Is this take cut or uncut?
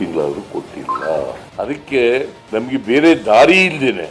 uncut